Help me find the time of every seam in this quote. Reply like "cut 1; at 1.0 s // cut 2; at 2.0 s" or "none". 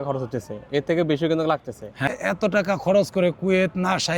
cut 1; at 2.1 s

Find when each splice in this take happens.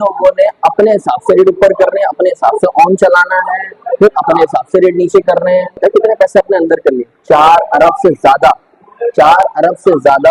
cut 1; at 5.8 s

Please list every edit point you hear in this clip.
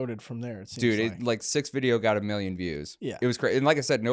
none

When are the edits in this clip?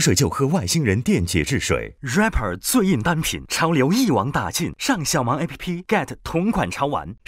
cut 1; at 1.9 s

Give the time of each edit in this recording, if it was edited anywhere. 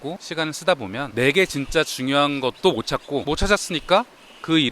cut 1; at 3.2 s

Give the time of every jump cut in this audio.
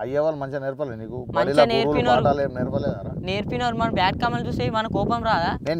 none

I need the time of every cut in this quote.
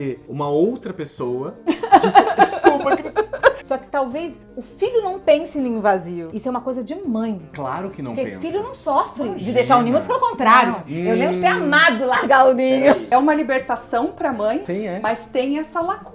cut 1; at 3.6 s // cut 2; at 6.3 s // cut 3; at 13.0 s // cut 4; at 14.6 s

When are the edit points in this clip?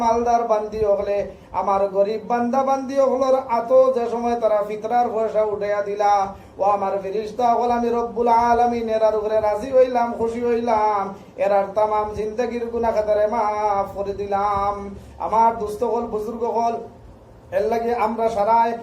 none

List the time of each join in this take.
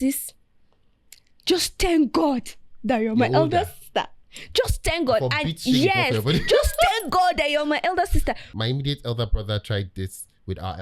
cut 1; at 8.5 s

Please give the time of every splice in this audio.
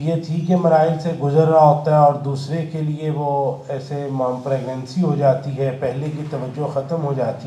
none

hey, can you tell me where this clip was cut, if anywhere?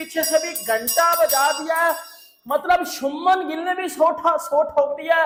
none

